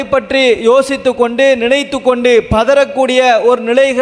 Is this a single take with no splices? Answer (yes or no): yes